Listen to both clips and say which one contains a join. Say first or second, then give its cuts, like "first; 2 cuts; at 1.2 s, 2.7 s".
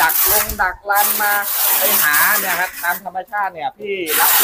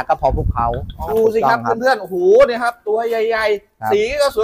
second; 1 cut; at 1.1 s